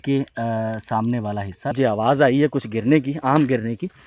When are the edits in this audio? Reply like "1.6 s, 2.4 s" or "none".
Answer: 1.7 s